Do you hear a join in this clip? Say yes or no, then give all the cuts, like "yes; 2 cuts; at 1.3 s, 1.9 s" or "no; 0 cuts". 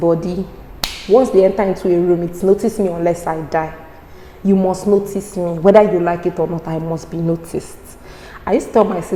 no; 0 cuts